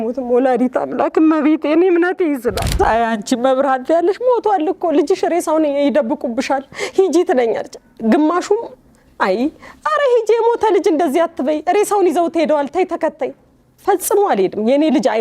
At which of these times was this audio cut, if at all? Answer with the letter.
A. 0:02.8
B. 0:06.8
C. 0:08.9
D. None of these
A